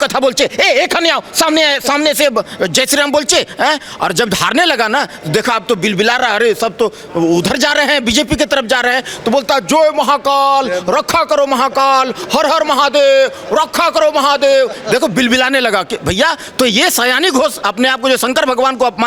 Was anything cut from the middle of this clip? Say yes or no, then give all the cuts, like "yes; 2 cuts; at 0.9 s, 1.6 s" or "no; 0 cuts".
no; 0 cuts